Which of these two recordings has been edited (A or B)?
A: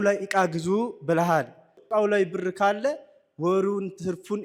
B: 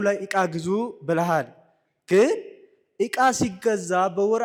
A